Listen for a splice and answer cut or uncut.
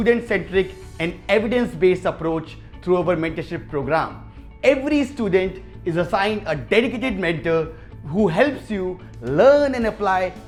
uncut